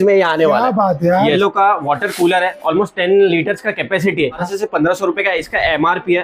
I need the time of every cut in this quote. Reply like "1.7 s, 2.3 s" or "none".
1.4 s, 4.4 s

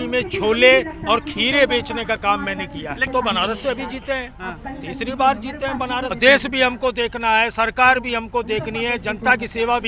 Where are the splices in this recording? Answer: 3.1 s, 6.1 s

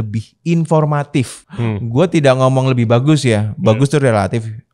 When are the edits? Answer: 1.8 s

